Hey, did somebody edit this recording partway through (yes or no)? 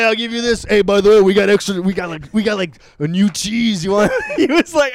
no